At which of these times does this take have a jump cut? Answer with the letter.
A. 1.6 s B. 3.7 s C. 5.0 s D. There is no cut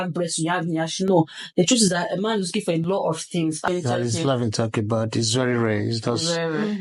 B